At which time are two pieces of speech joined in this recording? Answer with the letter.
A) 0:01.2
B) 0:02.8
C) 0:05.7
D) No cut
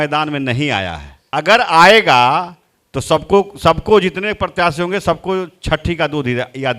A